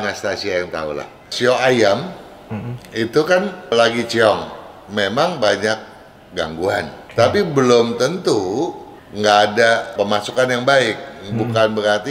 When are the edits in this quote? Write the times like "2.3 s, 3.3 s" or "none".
1.3 s, 3.7 s, 7.0 s, 9.9 s